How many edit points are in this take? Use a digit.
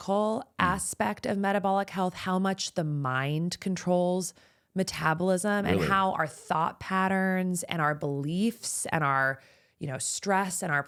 0